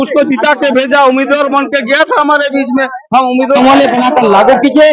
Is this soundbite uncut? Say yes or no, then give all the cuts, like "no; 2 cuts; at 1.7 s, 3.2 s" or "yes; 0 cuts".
no; 1 cut; at 3.6 s